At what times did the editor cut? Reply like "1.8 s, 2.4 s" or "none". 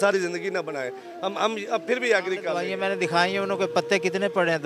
2.6 s